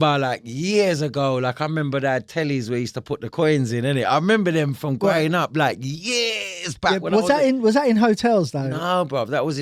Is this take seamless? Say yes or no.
yes